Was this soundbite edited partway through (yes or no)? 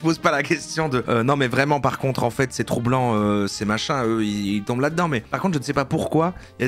no